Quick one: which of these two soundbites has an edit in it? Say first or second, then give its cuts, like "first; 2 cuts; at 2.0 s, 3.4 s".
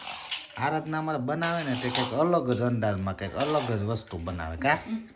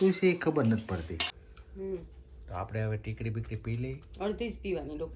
second; 1 cut; at 1.3 s